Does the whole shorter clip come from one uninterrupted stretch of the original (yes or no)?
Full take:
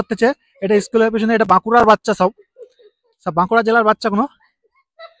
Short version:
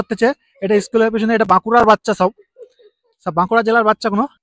yes